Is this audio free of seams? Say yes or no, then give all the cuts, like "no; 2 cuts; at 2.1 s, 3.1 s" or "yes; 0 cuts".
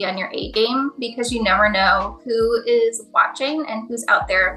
yes; 0 cuts